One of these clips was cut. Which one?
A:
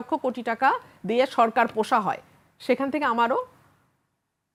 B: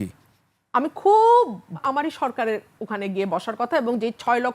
B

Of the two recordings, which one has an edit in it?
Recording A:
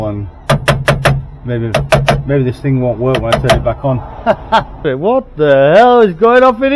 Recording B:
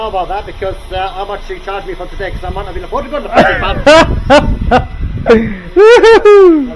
A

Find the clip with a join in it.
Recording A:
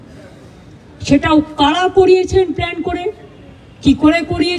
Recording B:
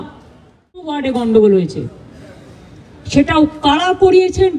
B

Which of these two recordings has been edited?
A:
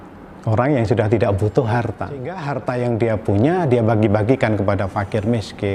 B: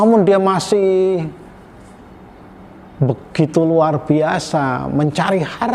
A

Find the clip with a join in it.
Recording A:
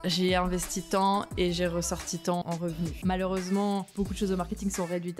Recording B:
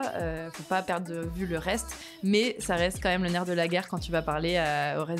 A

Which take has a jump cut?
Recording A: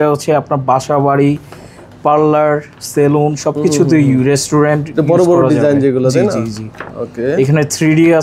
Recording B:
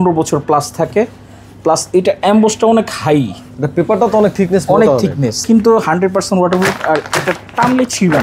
B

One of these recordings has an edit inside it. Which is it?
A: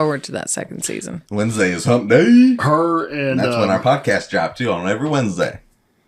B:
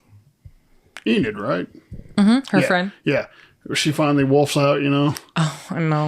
A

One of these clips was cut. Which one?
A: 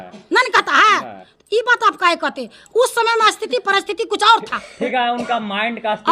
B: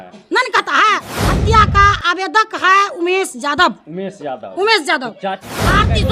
B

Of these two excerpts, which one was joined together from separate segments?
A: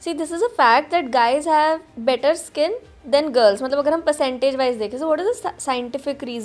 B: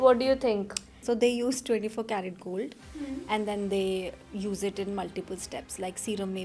B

